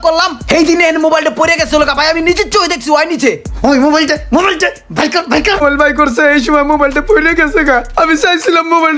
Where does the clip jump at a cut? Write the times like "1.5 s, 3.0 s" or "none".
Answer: 5.6 s